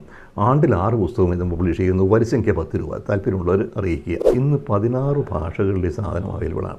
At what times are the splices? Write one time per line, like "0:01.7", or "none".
0:04.3